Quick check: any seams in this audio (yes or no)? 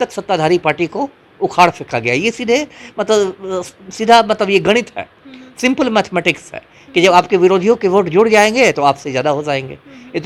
no